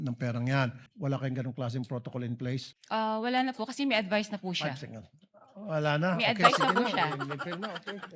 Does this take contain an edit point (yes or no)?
yes